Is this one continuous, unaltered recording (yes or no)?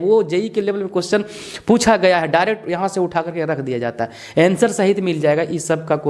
yes